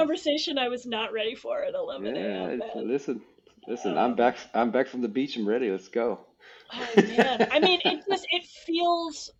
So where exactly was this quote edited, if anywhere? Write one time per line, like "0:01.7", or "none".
none